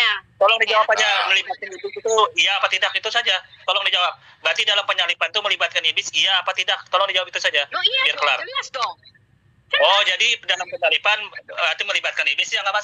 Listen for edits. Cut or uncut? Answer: uncut